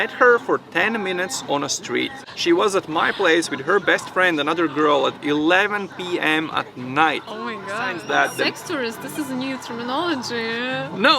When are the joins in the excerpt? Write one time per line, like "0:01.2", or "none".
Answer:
0:02.2
0:08.0